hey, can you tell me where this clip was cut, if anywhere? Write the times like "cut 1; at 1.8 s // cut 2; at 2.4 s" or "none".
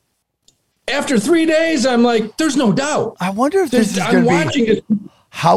none